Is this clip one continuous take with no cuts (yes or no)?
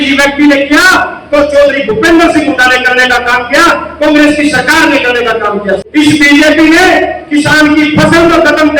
no